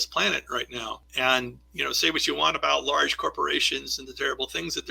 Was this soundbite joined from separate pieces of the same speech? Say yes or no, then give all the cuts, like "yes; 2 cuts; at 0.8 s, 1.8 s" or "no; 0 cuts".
yes; 1 cut; at 1.0 s